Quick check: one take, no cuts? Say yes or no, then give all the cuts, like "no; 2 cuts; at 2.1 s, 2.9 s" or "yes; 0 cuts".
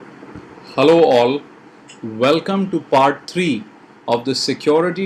yes; 0 cuts